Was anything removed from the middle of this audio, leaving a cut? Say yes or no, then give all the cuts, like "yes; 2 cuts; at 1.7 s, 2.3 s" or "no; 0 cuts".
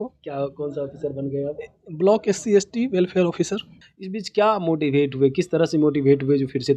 yes; 1 cut; at 3.8 s